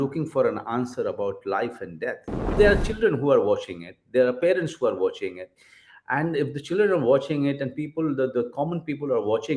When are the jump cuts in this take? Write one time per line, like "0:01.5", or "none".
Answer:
0:02.5